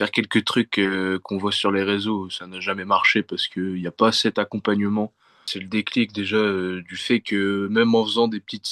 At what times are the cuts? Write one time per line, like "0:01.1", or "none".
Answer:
0:05.6